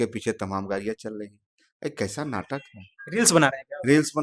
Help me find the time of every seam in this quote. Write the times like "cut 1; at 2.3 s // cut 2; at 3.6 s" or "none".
none